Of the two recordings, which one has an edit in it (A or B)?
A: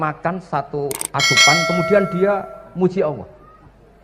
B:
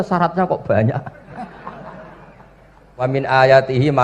B